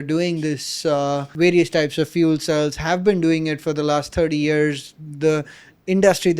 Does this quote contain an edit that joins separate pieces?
yes; 1 cut; at 1.3 s

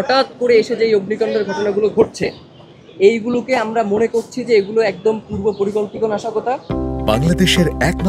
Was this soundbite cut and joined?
no; 0 cuts

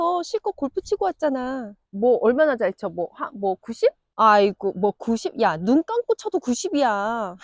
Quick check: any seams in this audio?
no; 0 cuts

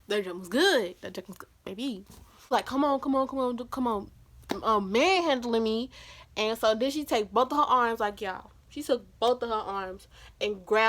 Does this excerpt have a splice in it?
yes; 1 cut; at 2.5 s

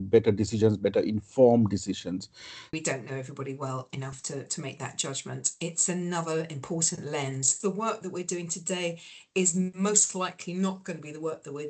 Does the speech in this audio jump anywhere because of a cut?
yes; 2 cuts; at 2.8 s, 7.5 s

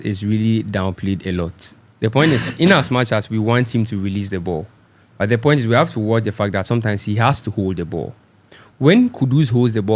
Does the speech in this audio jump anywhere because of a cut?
no; 0 cuts

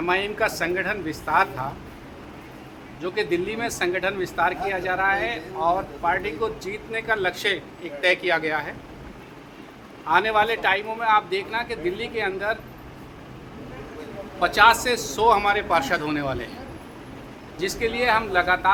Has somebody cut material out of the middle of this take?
no; 0 cuts

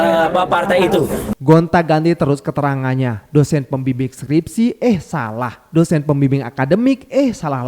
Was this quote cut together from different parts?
yes; 1 cut; at 1.2 s

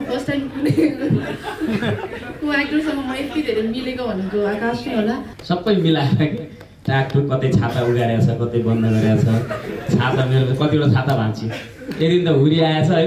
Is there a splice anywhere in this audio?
yes; 1 cut; at 5.3 s

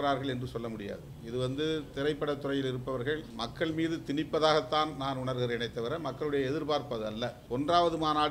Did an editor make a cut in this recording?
yes; 3 cuts; at 1.1 s, 3.3 s, 7.4 s

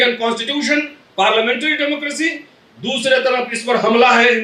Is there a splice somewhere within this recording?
no; 0 cuts

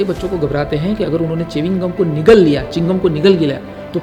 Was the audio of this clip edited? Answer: no; 0 cuts

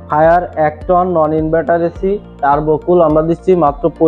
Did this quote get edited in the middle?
no; 0 cuts

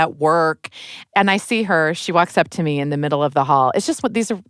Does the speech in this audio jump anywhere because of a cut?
yes; 1 cut; at 1.1 s

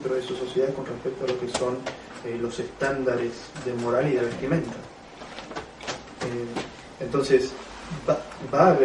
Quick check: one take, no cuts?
no; 1 cut; at 4.3 s

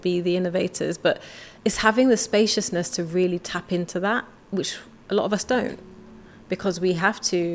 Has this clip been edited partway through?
no; 0 cuts

